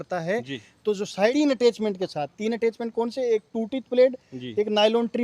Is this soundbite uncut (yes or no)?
no